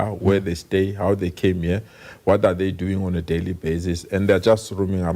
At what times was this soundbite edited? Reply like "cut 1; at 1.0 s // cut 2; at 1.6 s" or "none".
none